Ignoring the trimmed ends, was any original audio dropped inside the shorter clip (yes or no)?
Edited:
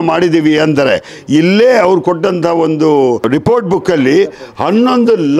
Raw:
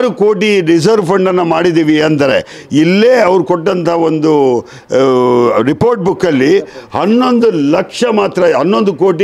yes